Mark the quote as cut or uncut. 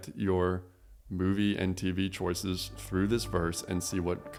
uncut